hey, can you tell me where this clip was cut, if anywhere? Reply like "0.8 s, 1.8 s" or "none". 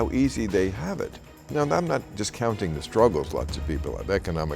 1.4 s